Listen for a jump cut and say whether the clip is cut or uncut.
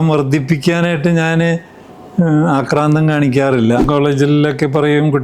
cut